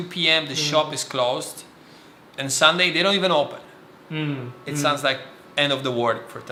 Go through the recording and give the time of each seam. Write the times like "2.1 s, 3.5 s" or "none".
none